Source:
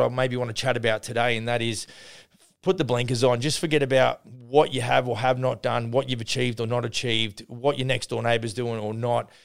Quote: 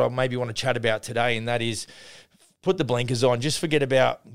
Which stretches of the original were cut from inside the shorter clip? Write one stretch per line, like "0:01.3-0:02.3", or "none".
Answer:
none